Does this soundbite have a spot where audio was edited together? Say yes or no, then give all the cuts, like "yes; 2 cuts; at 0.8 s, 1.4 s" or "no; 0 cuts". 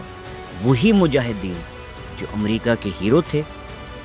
no; 0 cuts